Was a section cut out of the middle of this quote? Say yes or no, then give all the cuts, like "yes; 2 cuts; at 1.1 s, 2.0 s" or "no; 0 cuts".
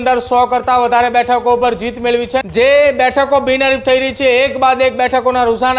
yes; 1 cut; at 2.4 s